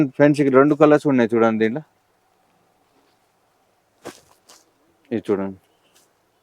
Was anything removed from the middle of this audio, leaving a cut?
no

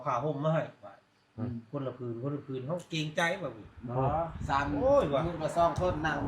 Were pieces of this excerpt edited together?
no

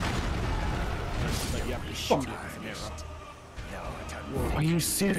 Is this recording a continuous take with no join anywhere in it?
yes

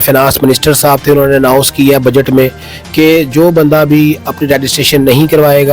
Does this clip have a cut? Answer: no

